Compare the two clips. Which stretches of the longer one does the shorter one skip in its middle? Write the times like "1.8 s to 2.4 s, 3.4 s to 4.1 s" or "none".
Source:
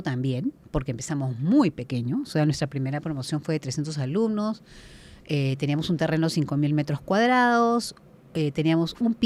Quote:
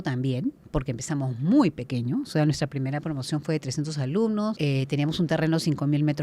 4.6 s to 5.3 s